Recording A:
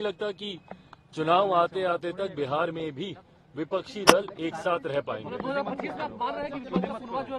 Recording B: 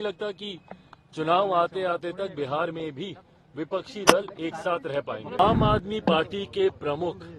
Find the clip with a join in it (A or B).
B